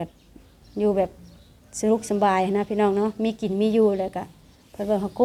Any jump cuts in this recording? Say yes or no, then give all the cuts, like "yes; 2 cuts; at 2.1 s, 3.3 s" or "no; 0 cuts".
no; 0 cuts